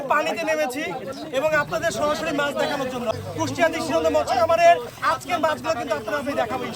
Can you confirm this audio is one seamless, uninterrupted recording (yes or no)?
no